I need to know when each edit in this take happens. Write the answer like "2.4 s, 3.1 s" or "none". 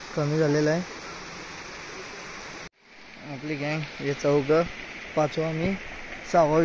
2.7 s